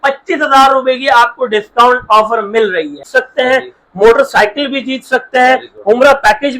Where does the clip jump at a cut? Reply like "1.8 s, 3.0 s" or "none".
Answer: 3.0 s